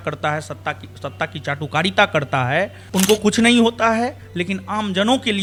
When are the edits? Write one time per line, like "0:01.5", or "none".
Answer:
none